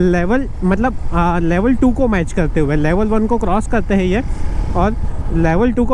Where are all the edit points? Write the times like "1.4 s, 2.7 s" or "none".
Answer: none